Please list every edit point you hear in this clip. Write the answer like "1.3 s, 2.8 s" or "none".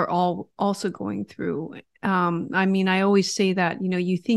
none